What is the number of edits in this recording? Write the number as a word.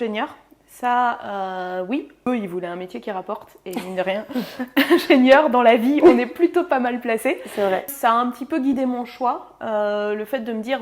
two